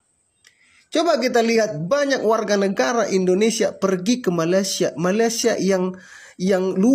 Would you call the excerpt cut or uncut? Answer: uncut